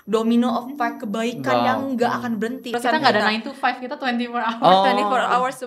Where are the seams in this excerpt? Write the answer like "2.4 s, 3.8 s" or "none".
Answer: 2.7 s